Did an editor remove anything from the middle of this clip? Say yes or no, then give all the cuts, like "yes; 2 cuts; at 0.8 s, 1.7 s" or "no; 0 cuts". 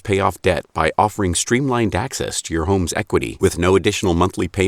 no; 0 cuts